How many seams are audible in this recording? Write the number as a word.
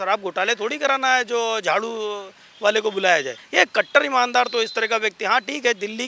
one